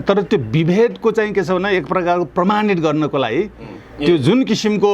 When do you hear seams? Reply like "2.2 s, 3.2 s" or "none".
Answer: none